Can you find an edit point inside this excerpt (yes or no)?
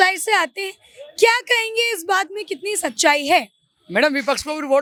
no